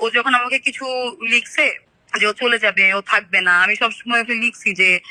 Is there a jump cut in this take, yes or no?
no